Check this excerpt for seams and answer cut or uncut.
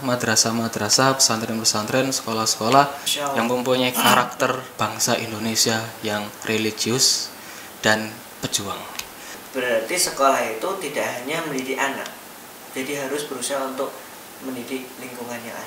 cut